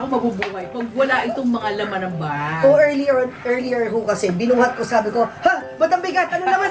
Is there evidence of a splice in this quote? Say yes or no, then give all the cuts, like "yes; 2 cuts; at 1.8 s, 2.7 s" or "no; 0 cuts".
no; 0 cuts